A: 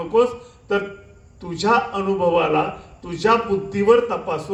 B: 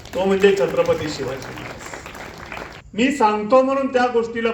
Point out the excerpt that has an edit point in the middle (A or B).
B